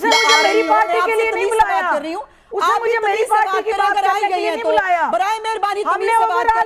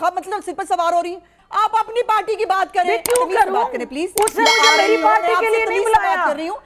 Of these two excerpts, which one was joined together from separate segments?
second; 1 cut; at 1.4 s

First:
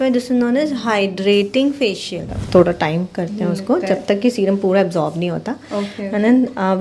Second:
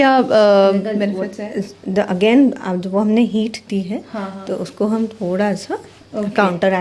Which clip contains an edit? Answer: first; 1 cut; at 2.4 s

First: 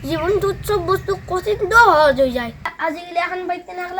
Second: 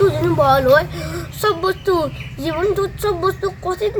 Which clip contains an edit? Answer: first; 1 cut; at 2.7 s

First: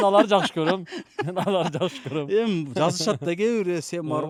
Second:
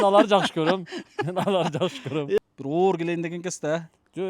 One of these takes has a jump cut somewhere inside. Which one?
second; 1 cut; at 2.4 s

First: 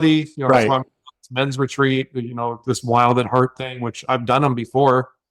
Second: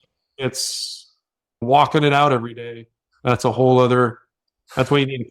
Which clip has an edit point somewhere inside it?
second; 1 cut; at 1.6 s

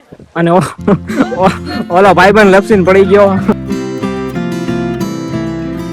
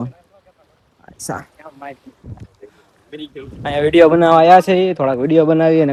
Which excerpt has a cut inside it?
first; 1 cut; at 3.5 s

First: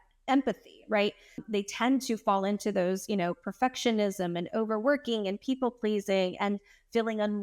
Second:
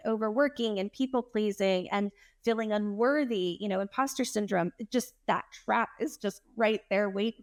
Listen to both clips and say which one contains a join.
first; 1 cut; at 1.4 s

